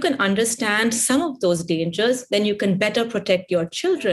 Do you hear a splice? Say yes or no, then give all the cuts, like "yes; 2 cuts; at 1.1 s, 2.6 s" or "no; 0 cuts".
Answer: no; 0 cuts